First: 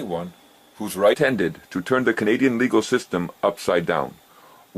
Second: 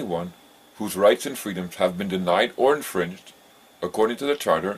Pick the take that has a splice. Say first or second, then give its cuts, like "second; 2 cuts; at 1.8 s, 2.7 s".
second; 1 cut; at 1.2 s